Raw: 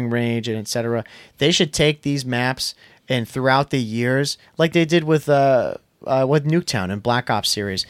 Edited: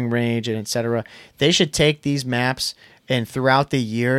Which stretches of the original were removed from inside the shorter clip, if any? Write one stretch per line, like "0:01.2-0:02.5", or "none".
none